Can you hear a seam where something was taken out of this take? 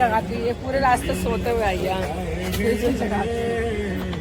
no; 0 cuts

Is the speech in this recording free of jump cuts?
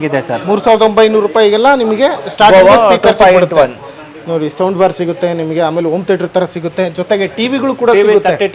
yes; 0 cuts

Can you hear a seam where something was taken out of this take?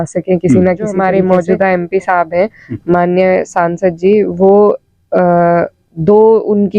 yes; 1 cut; at 1.0 s

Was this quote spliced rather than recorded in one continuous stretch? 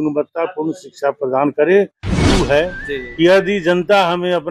yes; 1 cut; at 2.1 s

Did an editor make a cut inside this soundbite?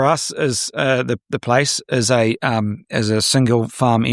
no; 0 cuts

